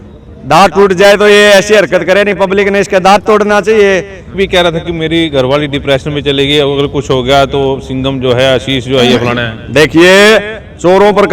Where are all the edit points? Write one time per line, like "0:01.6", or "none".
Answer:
0:04.4